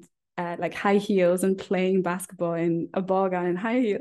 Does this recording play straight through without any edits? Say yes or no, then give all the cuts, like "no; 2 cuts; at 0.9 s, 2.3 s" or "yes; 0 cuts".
yes; 0 cuts